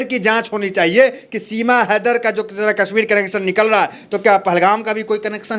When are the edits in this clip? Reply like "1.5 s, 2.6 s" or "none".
none